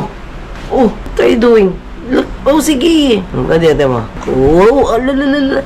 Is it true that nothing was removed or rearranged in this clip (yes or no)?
no